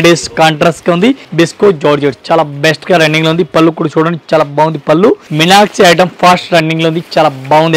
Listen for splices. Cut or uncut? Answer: cut